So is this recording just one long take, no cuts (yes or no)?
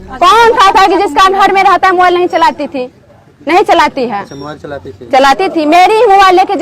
yes